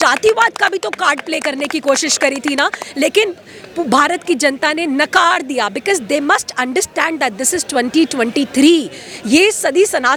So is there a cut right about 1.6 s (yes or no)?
no